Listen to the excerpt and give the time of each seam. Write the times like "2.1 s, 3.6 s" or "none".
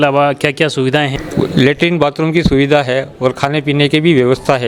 1.1 s